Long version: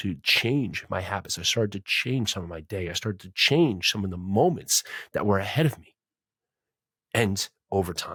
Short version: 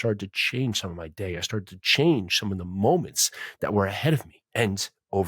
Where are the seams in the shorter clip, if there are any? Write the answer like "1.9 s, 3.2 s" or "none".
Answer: 4.4 s